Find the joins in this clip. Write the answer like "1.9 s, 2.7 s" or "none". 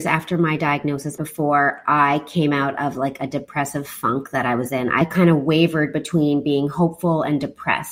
1.1 s, 5.0 s